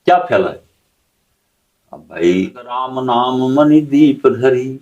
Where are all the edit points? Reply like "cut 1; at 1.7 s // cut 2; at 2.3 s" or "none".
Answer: cut 1; at 2.9 s